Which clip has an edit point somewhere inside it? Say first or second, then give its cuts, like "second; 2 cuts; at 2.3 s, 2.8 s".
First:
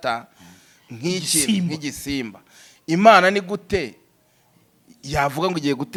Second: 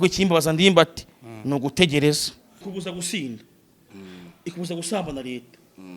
second; 1 cut; at 2.6 s